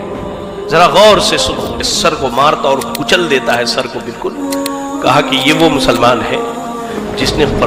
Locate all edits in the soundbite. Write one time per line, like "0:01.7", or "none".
0:01.8